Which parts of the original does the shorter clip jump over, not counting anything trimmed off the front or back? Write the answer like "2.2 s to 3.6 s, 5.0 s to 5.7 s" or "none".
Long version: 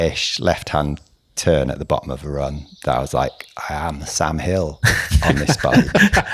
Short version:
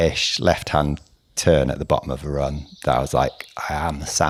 none